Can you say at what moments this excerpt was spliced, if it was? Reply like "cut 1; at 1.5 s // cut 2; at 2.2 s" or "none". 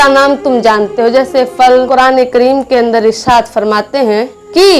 cut 1; at 1.9 s

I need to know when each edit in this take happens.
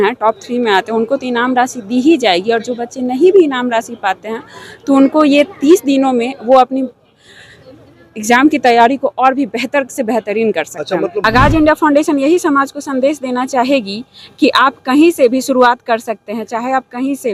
cut 1; at 11.2 s

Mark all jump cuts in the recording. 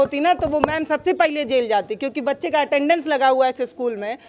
none

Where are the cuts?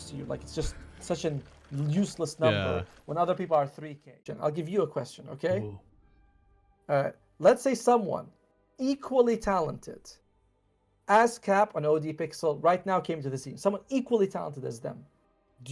cut 1; at 4.2 s

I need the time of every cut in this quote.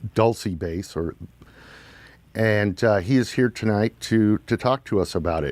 cut 1; at 4.0 s

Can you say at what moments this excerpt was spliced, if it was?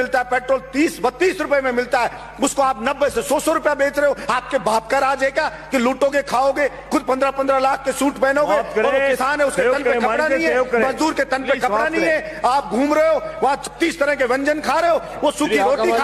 none

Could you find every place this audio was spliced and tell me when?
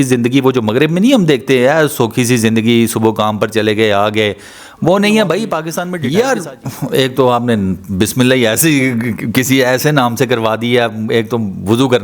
cut 1; at 5.6 s

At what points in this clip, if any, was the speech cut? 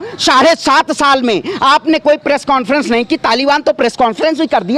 none

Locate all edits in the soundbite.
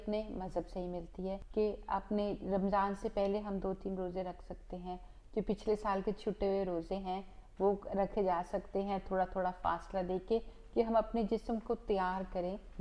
cut 1; at 1.4 s

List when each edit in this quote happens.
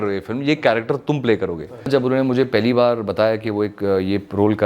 cut 1; at 1.9 s

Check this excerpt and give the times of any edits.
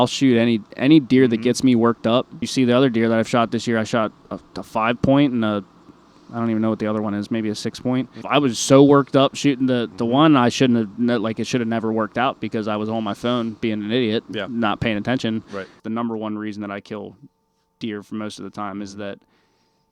cut 1; at 2.4 s // cut 2; at 8.2 s // cut 3; at 15.8 s

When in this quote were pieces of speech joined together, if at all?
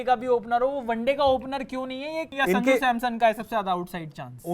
cut 1; at 2.3 s

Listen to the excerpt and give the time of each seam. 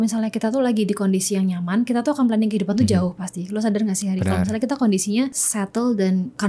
cut 1; at 5.4 s

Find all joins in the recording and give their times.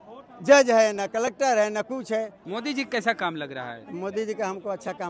cut 1; at 2.4 s

